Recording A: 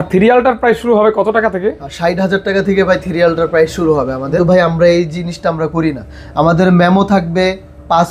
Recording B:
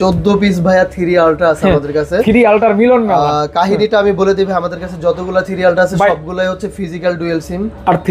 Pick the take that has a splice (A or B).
A